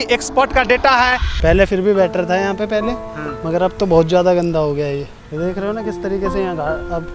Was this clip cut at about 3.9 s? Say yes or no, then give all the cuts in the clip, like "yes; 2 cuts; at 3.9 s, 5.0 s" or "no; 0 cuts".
no; 2 cuts; at 1.3 s, 5.2 s